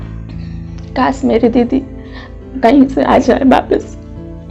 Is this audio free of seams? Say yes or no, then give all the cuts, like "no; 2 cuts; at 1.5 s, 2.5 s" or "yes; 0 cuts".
no; 2 cuts; at 0.9 s, 3.8 s